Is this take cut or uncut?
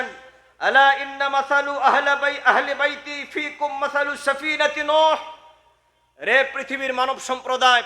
uncut